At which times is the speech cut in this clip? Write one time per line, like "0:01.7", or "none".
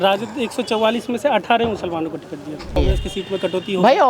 0:02.8